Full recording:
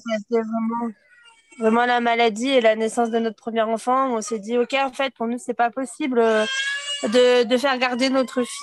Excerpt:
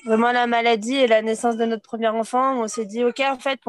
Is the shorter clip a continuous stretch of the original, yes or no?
yes